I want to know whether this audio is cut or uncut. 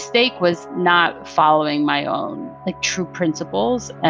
uncut